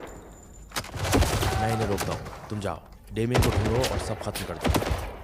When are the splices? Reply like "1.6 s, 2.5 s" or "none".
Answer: 1.0 s